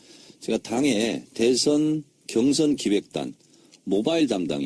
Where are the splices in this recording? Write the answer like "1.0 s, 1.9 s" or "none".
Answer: none